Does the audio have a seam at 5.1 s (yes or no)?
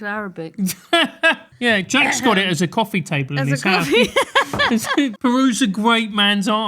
yes